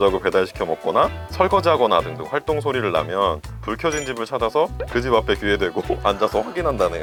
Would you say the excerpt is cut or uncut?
uncut